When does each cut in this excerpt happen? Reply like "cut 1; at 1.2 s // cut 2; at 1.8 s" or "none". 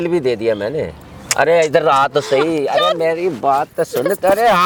none